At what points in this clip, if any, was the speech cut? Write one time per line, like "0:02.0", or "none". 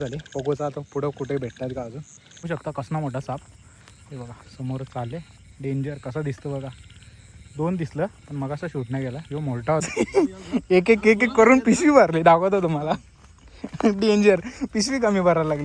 0:02.5
0:09.8